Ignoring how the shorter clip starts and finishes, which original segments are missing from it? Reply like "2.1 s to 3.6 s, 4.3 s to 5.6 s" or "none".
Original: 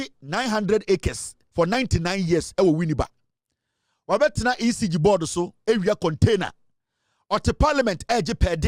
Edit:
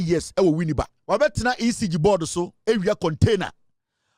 3.1 s to 3.9 s